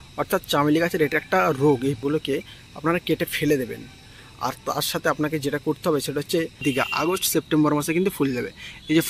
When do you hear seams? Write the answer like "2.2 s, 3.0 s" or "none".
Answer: 2.0 s, 6.6 s

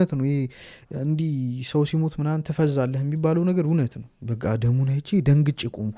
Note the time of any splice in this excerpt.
none

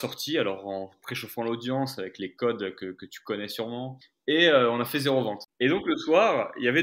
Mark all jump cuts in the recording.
4.0 s, 5.4 s

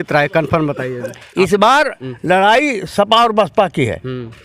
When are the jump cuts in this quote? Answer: none

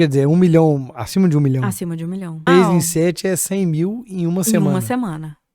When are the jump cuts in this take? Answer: 2.4 s

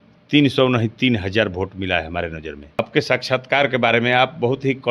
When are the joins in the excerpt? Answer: 2.8 s

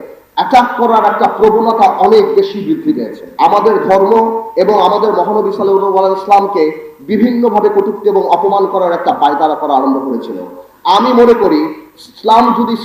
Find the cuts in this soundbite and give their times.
3.2 s

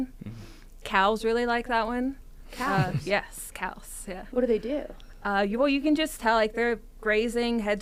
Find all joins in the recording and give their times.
none

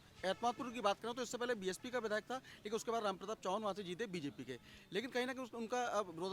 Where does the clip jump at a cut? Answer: none

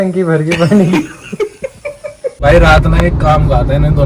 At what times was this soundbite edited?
2.4 s

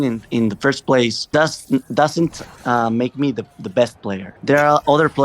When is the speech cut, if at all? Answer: 1.3 s

